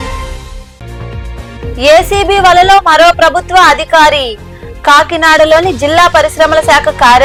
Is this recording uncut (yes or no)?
yes